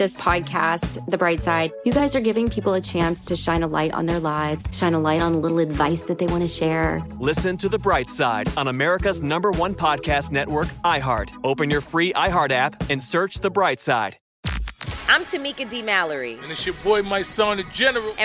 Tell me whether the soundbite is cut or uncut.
cut